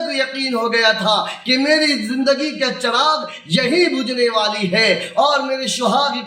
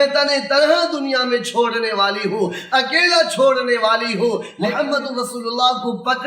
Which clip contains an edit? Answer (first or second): second